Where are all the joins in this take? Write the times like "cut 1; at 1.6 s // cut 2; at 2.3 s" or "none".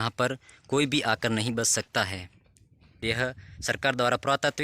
cut 1; at 3.0 s